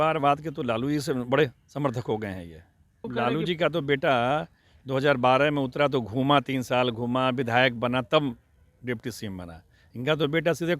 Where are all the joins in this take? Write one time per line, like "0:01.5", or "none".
0:03.1